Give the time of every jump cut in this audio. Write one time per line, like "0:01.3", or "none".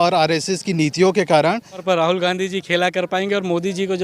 0:01.8